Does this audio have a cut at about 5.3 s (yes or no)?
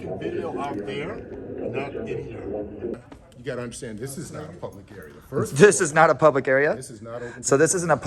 no